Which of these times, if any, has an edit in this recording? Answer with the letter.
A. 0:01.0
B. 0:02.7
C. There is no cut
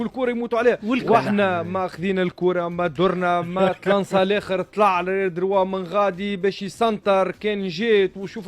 A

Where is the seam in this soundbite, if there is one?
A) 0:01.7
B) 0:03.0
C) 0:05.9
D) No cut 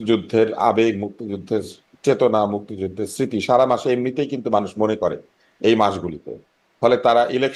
D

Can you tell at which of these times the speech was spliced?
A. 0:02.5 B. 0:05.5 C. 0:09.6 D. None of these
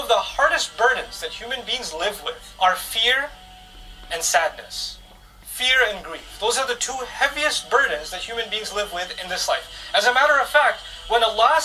A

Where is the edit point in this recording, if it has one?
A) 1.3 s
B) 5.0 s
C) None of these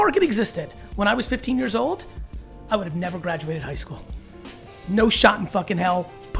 C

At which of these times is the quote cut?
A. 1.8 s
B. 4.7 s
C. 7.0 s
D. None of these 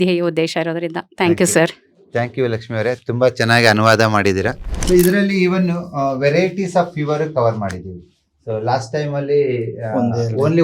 B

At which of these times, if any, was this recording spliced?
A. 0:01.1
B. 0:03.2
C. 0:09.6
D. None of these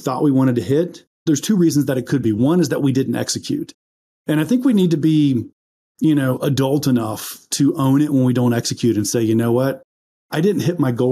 A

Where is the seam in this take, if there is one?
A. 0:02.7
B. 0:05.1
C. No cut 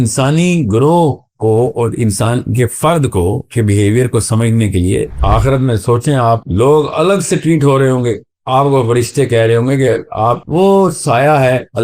B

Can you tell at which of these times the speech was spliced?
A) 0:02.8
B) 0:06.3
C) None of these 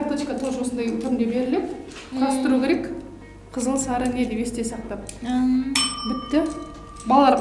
C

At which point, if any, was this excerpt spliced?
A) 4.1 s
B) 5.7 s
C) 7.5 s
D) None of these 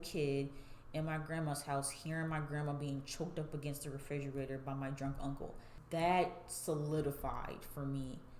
B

